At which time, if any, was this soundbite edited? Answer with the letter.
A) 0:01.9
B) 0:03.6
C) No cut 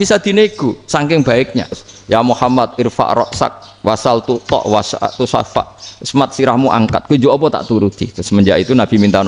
A